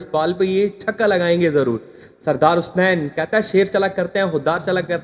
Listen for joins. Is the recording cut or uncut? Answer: uncut